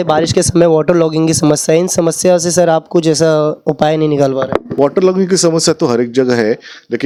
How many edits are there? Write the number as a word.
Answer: zero